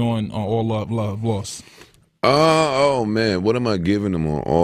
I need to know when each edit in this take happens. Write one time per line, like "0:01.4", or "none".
0:03.6